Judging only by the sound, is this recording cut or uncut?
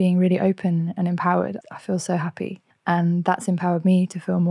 cut